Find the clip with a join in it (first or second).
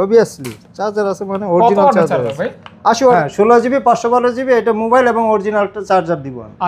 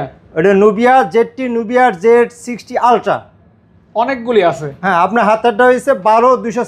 first